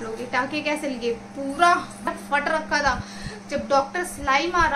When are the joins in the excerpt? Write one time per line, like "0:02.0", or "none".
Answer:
0:02.1